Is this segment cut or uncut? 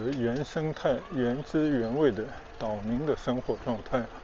uncut